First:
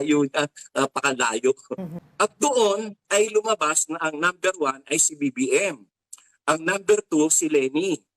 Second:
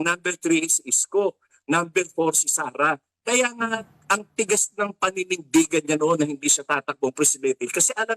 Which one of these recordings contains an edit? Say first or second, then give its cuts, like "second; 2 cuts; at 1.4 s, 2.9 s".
first; 1 cut; at 2.0 s